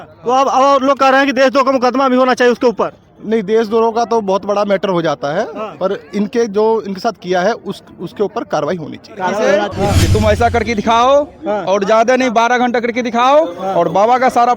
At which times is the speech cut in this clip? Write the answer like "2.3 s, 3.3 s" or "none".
9.7 s

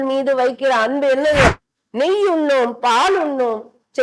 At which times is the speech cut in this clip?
1.5 s

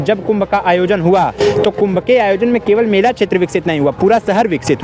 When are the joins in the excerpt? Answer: none

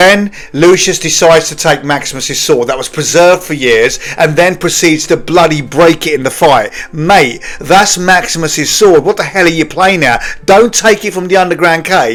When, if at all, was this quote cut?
none

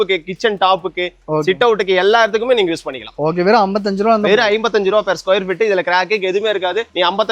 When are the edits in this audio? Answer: none

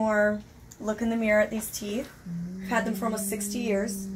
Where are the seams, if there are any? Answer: none

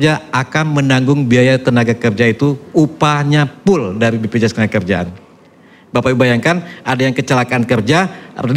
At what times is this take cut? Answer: none

